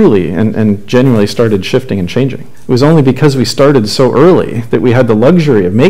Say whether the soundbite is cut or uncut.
cut